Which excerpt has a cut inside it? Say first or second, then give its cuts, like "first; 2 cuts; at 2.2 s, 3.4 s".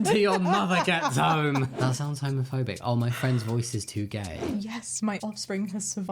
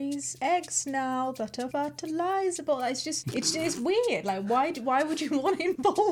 first; 2 cuts; at 1.7 s, 4.5 s